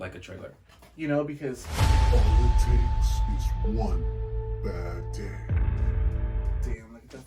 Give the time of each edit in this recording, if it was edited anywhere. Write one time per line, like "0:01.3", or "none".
none